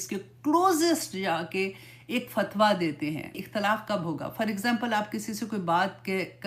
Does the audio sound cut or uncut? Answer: cut